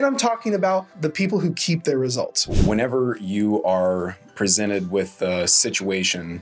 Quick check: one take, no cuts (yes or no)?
no